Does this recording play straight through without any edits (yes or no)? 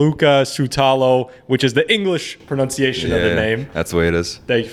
yes